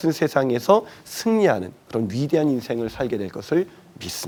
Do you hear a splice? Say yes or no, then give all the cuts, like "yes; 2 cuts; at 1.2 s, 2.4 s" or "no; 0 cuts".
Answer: no; 0 cuts